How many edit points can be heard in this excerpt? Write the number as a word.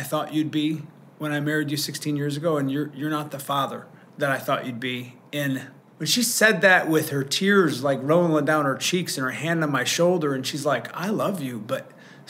one